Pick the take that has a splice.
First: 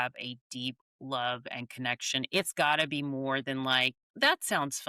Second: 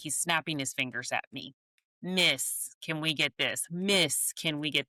first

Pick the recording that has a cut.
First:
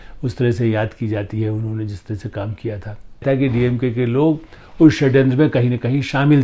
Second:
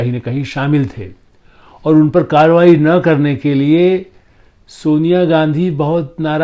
first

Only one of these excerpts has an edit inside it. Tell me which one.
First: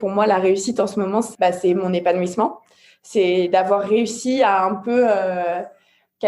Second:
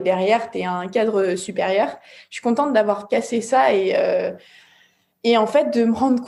first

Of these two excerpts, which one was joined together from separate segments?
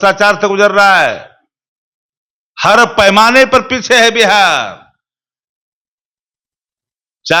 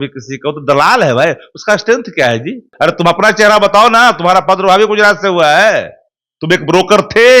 second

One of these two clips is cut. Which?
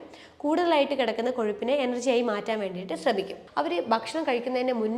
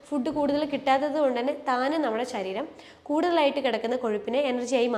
first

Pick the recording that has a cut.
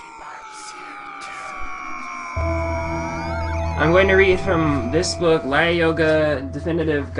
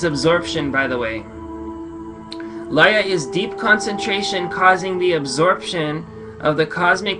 second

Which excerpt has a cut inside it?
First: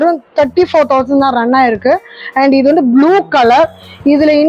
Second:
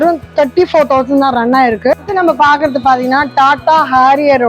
second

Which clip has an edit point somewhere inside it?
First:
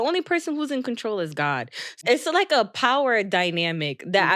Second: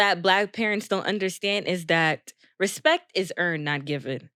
first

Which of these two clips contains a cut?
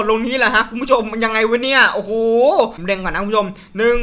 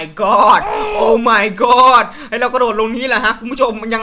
first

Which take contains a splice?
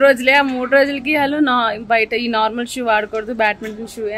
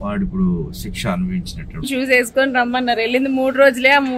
second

